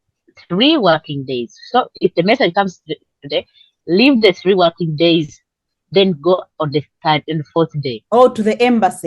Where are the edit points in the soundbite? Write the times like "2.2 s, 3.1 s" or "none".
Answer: 8.0 s